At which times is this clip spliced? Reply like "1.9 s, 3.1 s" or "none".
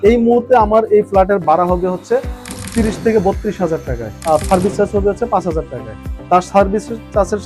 none

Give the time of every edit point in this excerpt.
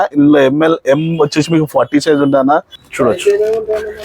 2.8 s

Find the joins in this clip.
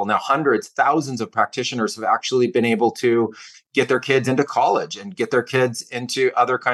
none

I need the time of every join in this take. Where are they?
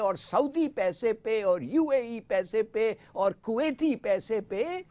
none

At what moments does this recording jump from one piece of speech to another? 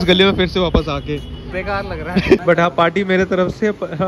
2.4 s

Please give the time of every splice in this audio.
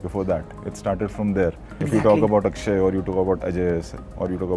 1.8 s

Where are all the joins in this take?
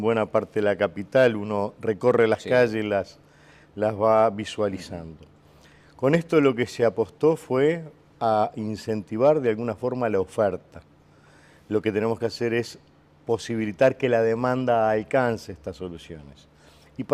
4.2 s

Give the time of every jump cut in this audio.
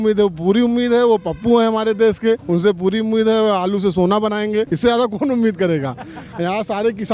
2.4 s, 4.7 s

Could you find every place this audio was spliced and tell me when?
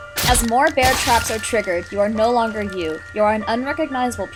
none

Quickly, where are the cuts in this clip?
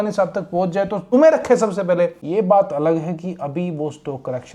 1.0 s, 2.2 s

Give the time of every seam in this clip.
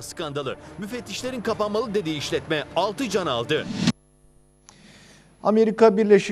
none

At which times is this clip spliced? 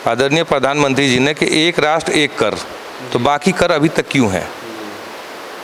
none

